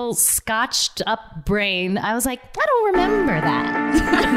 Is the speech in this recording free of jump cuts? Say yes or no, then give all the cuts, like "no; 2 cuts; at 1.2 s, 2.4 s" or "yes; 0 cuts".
yes; 0 cuts